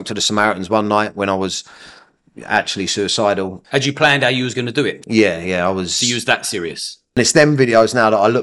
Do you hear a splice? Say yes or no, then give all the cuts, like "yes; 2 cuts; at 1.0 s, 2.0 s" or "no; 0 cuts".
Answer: yes; 2 cuts; at 3.6 s, 7.2 s